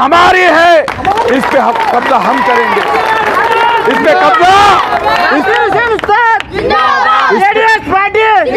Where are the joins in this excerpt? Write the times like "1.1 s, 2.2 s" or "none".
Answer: none

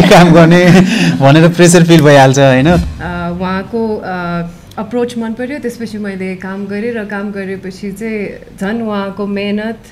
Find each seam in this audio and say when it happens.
2.8 s

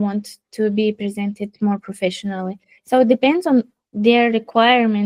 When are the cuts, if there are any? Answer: none

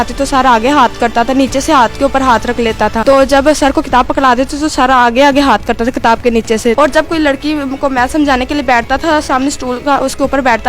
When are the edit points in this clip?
3.0 s, 6.8 s

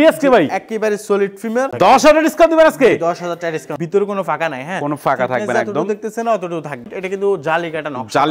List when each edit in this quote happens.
1.7 s, 3.7 s, 6.8 s

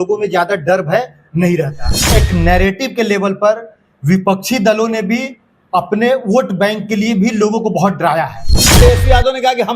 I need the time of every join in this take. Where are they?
2.0 s, 8.7 s

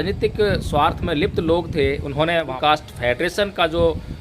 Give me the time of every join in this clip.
2.5 s

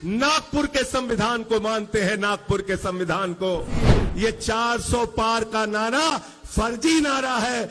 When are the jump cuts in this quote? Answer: 3.8 s

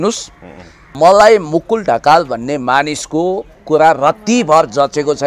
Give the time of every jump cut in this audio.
0.9 s

